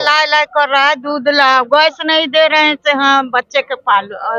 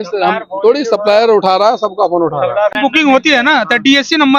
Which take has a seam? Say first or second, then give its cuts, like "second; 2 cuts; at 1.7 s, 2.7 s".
second; 1 cut; at 2.7 s